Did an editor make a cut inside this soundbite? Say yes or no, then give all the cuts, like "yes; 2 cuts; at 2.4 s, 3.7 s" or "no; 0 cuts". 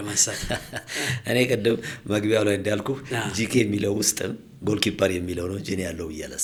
no; 0 cuts